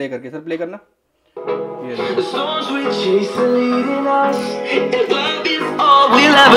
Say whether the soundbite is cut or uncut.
uncut